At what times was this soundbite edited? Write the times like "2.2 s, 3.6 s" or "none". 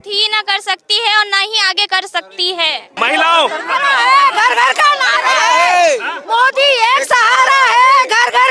2.9 s